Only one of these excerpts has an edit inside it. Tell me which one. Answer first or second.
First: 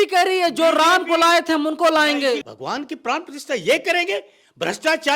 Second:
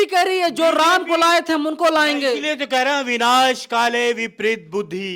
first